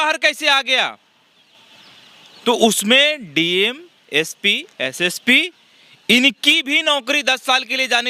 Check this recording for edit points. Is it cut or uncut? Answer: uncut